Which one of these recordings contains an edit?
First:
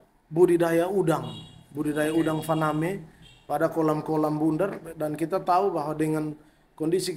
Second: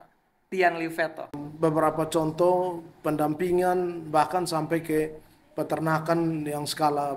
second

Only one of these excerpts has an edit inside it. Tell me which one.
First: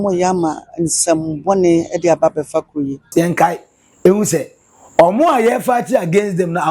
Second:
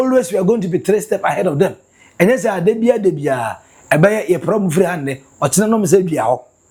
first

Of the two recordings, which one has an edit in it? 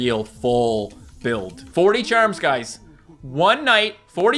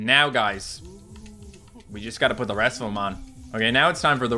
first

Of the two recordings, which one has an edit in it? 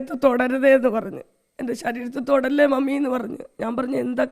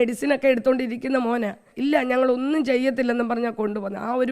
second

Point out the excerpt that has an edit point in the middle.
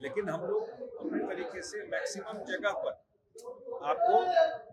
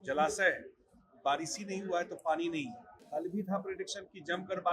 second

